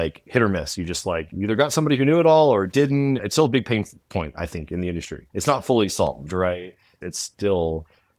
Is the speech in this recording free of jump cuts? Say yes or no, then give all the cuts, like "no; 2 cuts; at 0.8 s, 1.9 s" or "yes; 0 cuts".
no; 2 cuts; at 3.3 s, 5.2 s